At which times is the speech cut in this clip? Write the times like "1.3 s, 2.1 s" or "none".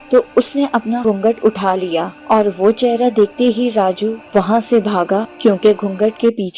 1.0 s, 2.1 s, 4.2 s, 5.3 s